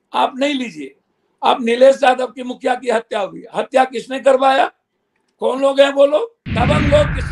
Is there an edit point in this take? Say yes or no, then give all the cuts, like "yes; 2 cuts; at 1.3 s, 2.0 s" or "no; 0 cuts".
yes; 1 cut; at 6.4 s